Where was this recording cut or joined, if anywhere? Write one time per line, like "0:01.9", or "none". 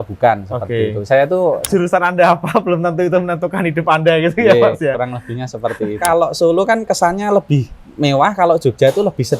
0:01.6
0:06.0